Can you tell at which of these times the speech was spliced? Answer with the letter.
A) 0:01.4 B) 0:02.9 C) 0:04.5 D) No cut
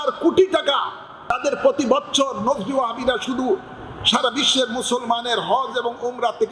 A